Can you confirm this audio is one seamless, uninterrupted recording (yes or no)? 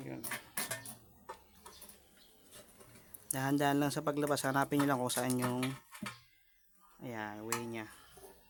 yes